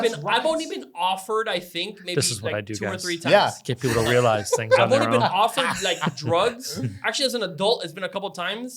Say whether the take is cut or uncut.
uncut